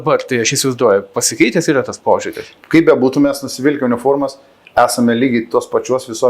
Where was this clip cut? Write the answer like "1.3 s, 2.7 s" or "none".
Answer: 2.6 s